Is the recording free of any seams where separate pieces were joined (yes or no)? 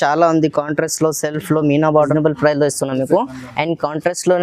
no